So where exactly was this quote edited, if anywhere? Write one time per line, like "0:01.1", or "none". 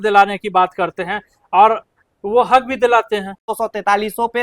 0:03.5